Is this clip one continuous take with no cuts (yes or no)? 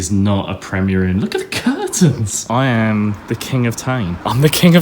no